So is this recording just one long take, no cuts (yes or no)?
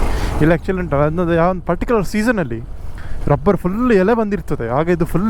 yes